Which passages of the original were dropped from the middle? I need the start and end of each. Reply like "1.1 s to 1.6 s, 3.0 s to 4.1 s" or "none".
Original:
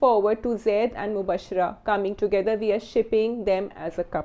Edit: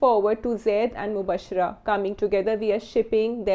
none

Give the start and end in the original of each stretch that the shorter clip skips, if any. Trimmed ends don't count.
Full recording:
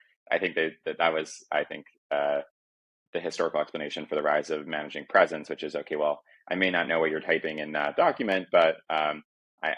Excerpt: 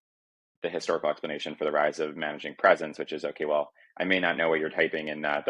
none

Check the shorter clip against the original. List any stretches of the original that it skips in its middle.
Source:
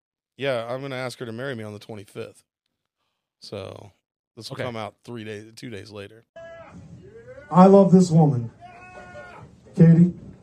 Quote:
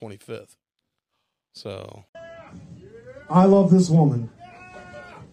3.9 s to 6.2 s

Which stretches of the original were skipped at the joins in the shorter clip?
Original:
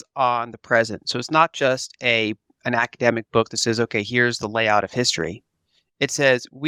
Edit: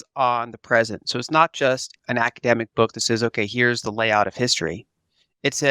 1.9 s to 2.5 s

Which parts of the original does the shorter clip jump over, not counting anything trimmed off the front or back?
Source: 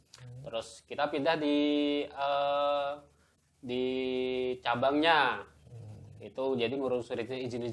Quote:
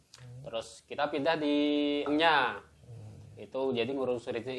2.1 s to 4.9 s

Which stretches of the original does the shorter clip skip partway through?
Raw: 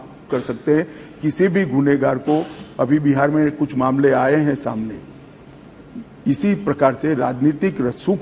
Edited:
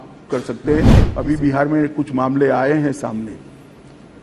1.0 s to 2.7 s

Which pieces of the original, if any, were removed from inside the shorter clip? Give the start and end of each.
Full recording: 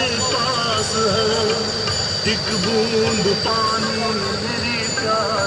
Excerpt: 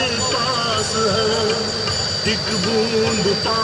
none

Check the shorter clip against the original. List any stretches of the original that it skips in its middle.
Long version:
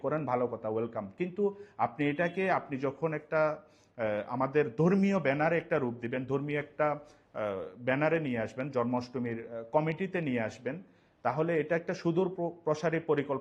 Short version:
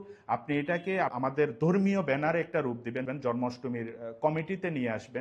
2.6 s to 4.3 s, 6.2 s to 8.6 s

